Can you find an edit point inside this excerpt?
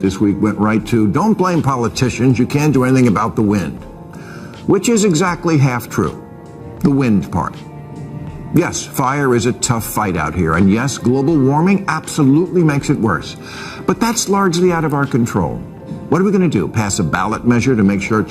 no; 0 cuts

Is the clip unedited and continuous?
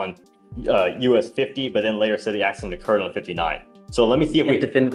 yes; 0 cuts

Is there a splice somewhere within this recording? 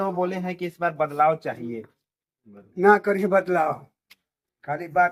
no; 0 cuts

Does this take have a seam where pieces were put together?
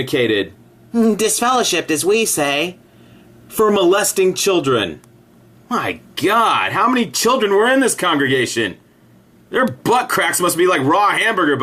no; 0 cuts

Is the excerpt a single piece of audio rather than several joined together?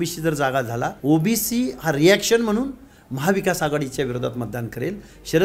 no; 1 cut; at 1.0 s

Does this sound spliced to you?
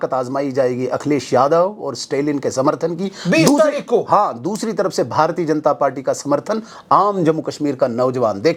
no; 0 cuts

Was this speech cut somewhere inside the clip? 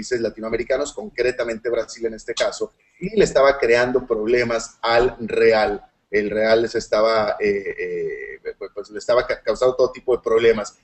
no; 0 cuts

